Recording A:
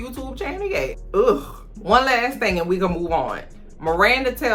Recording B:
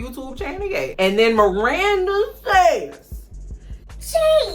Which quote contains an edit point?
B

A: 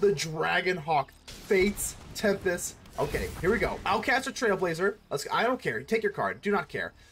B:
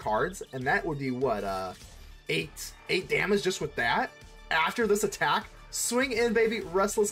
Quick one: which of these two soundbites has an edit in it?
A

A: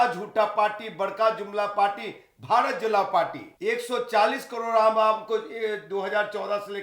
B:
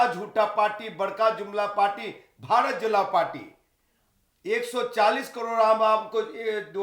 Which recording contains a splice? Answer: A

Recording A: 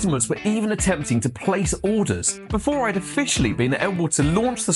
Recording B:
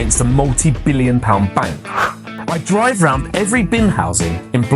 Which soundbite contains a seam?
B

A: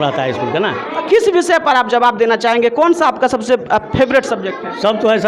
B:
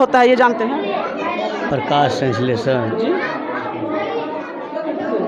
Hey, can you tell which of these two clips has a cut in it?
A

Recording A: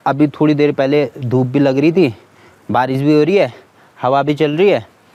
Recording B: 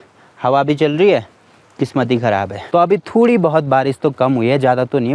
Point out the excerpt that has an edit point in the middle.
B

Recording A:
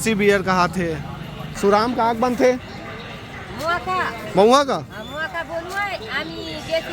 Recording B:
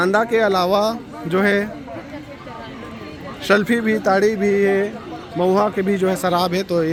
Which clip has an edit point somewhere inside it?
A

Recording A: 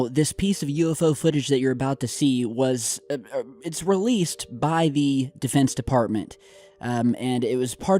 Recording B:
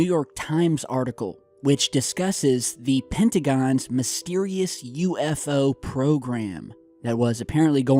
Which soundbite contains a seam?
A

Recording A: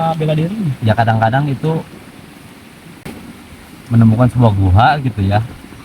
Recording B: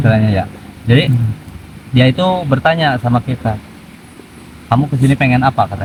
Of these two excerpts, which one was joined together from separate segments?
A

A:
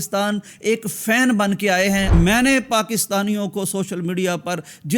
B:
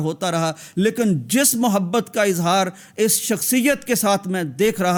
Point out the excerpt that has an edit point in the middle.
A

